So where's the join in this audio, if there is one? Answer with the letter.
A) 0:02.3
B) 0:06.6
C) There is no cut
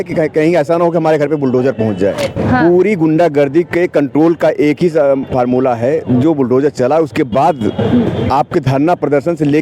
A